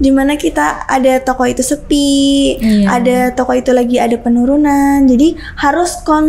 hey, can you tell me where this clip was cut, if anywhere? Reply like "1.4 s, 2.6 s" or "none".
none